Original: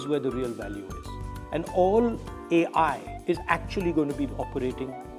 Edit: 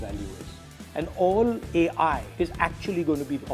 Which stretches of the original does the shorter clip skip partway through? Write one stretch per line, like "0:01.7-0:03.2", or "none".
0:02.2-0:02.4
0:03.0-0:03.1

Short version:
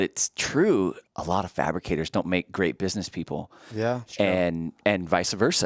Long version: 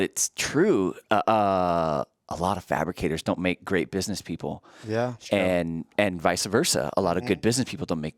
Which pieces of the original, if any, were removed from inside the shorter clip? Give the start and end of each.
0:01.0-0:02.1

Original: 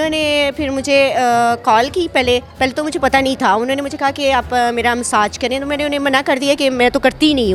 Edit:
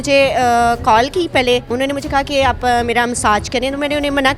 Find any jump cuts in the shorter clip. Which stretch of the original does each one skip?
0:02.5-0:03.6

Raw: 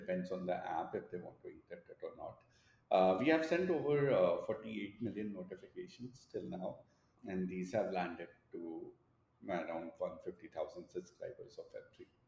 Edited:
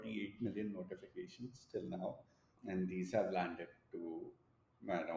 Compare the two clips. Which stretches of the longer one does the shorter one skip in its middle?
none

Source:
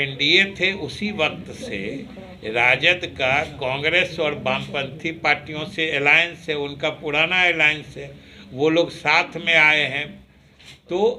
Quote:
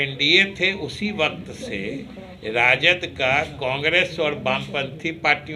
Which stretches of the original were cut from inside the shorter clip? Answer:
none

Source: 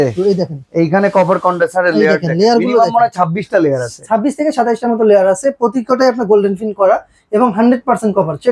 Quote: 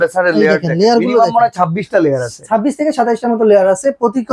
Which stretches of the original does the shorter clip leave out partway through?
none

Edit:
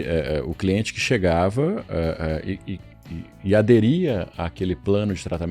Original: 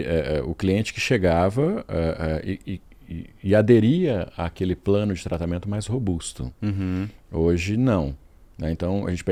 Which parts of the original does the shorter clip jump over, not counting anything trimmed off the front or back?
none

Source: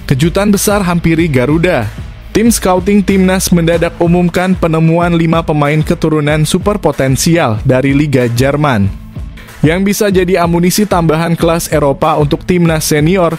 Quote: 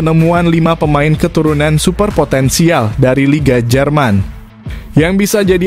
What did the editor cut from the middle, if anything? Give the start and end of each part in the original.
none

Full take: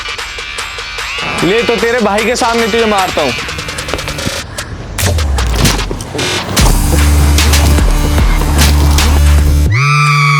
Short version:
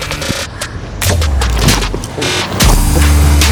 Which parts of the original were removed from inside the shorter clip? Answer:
none

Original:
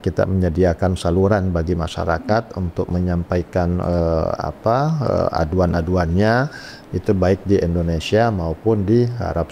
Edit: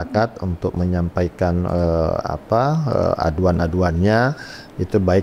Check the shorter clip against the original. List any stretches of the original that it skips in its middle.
none

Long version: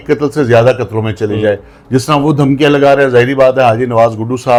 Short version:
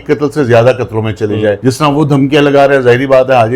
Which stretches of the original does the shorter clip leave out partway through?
0:01.6-0:01.9

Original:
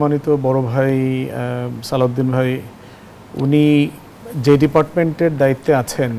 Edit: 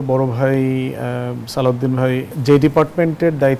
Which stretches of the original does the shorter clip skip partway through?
0:02.7-0:04.3

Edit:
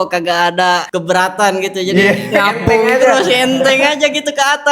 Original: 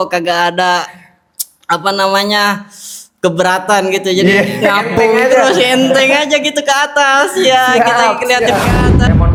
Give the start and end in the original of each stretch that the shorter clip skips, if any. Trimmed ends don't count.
0:00.9-0:03.2

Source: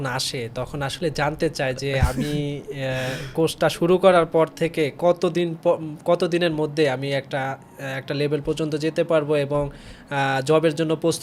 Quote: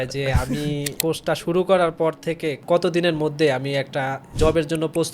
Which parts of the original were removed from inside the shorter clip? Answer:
0:02.6-0:03.3
0:04.9-0:06.0
0:07.7-0:10.4

